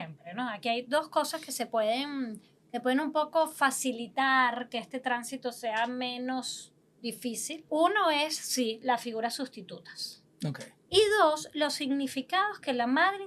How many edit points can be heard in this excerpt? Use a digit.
2